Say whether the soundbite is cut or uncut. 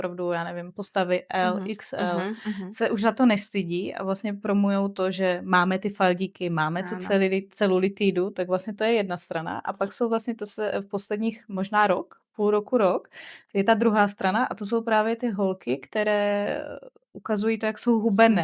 uncut